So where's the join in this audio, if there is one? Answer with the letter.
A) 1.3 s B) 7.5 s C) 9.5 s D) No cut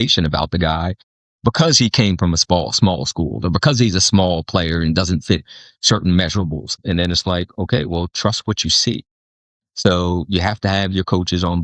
C